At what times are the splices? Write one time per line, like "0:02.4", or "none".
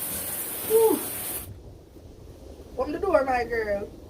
0:01.4
0:03.1